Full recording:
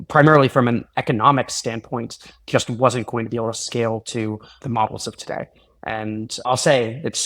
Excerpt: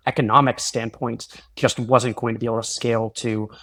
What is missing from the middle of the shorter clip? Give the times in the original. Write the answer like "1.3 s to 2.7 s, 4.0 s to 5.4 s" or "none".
none